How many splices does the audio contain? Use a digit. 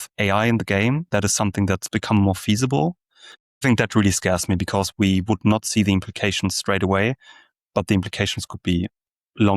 1